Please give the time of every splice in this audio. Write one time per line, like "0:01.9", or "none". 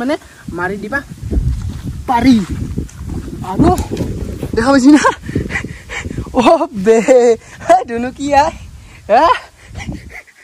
none

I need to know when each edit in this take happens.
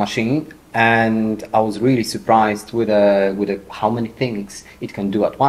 none

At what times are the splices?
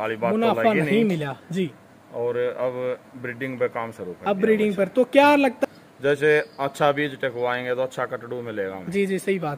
0:05.6

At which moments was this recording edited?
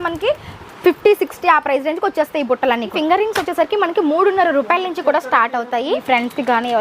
0:02.9
0:06.0

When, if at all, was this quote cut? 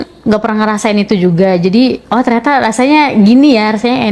none

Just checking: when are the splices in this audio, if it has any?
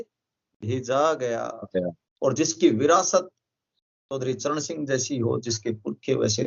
0:02.0

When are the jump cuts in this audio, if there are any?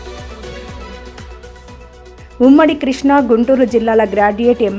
0:01.0
0:02.0

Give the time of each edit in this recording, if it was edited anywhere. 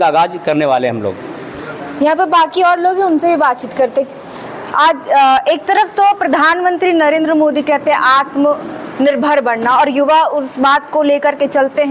none

